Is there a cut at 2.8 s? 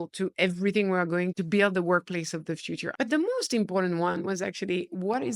yes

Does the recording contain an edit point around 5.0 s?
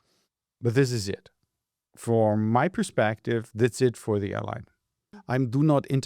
yes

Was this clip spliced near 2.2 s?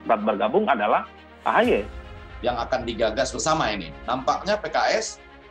yes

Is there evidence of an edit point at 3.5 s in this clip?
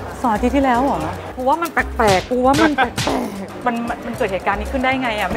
yes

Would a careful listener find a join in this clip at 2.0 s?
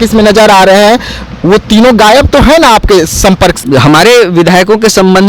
no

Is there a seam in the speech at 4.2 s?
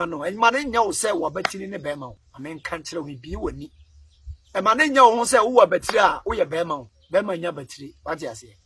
no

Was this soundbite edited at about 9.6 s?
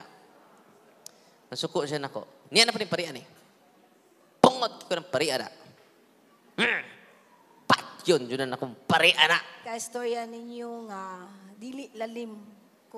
yes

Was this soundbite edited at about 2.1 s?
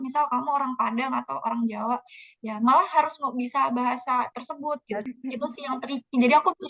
no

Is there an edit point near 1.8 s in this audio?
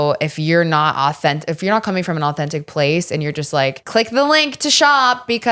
no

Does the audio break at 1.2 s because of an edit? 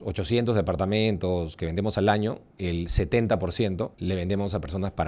no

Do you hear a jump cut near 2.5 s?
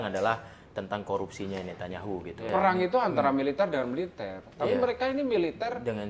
yes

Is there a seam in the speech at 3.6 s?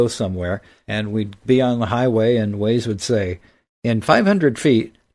no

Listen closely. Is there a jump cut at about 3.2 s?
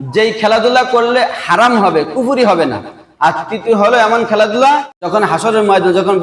no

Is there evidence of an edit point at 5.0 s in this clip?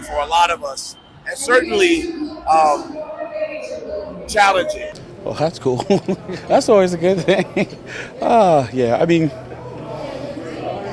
yes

